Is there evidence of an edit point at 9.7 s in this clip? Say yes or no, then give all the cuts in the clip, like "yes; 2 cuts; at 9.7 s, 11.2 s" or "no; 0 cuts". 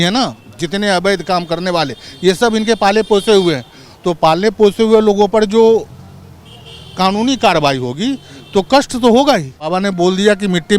yes; 1 cut; at 9.7 s